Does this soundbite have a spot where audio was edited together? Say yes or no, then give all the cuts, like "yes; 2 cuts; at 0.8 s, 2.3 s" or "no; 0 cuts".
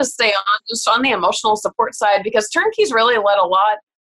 no; 0 cuts